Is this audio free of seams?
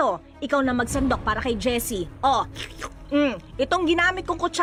yes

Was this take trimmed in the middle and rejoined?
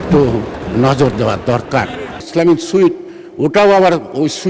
yes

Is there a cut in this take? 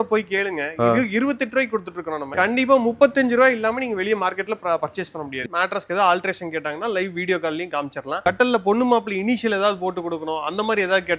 yes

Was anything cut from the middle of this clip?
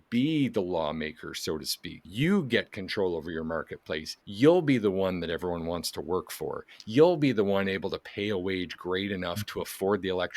yes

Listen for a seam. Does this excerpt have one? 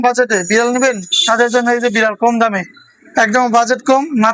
no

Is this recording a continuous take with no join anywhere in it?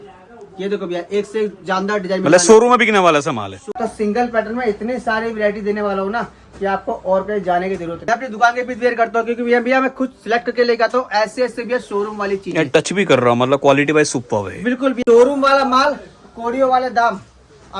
no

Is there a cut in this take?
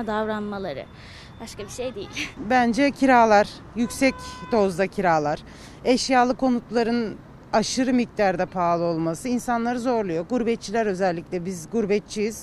no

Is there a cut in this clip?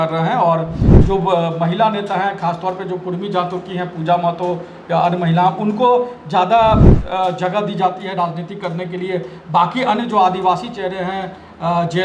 no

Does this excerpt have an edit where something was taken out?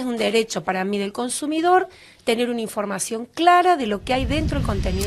no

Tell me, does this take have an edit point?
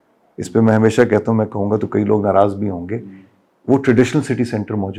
no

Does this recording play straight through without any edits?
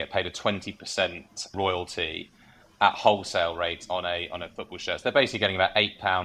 yes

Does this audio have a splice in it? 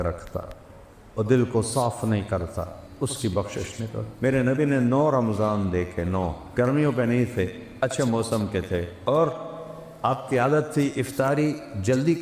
yes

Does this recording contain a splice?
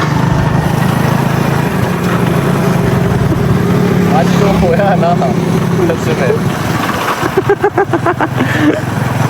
no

